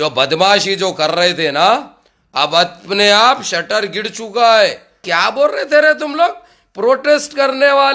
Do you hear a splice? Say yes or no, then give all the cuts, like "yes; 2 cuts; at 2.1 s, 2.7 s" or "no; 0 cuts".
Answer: yes; 1 cut; at 5.1 s